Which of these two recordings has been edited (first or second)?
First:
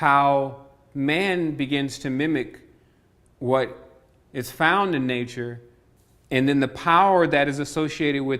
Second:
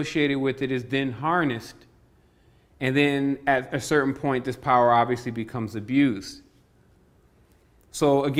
first